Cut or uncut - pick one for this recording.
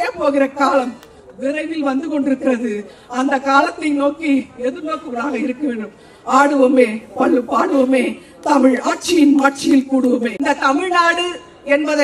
cut